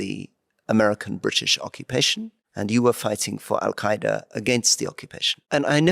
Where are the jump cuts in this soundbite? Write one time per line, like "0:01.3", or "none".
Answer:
none